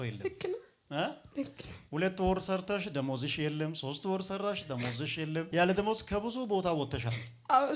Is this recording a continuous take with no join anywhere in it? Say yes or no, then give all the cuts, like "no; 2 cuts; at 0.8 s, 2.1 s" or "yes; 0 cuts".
yes; 0 cuts